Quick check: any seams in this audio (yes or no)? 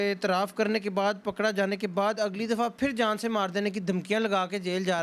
no